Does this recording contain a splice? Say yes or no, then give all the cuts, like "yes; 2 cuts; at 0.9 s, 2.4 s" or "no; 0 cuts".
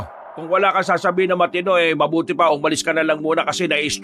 no; 0 cuts